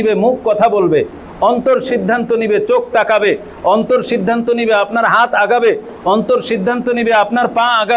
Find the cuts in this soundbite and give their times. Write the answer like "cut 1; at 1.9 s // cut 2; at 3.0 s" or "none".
none

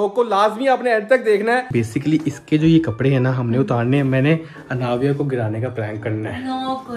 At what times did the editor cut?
cut 1; at 1.7 s

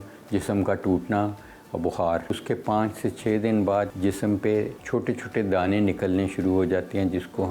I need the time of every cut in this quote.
cut 1; at 2.4 s // cut 2; at 3.9 s // cut 3; at 4.8 s

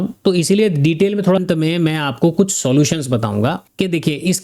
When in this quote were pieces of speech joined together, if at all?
cut 1; at 1.4 s

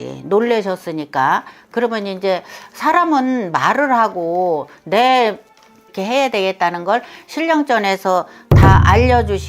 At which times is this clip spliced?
cut 1; at 5.9 s

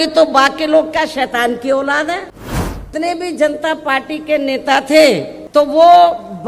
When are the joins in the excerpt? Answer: cut 1; at 2.9 s // cut 2; at 5.3 s

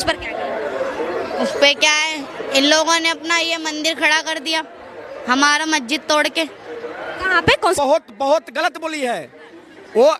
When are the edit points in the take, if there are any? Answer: cut 1; at 7.8 s

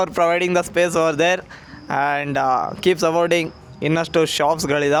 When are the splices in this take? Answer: none

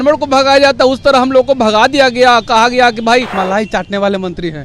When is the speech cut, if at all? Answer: cut 1; at 3.4 s

